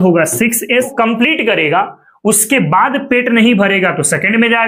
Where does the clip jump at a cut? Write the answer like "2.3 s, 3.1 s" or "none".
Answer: 0.9 s